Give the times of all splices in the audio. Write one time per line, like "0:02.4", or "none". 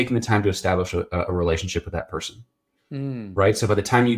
none